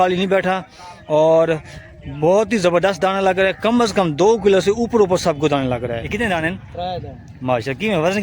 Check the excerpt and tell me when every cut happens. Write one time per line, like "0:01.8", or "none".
0:06.0